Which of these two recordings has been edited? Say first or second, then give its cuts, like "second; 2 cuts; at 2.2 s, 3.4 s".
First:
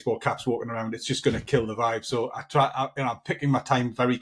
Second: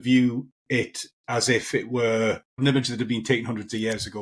second; 1 cut; at 2.6 s